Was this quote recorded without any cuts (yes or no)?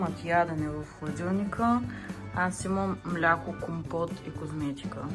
yes